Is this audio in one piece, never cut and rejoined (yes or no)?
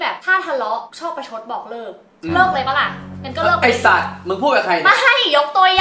yes